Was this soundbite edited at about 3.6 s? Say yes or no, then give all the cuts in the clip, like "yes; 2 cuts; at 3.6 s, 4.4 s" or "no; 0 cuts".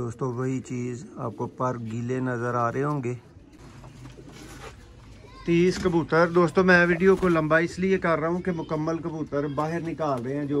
yes; 1 cut; at 3.6 s